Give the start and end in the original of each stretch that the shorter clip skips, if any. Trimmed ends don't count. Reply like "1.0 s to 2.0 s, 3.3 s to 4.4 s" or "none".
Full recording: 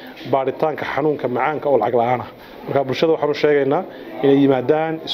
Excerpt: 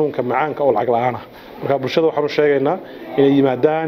none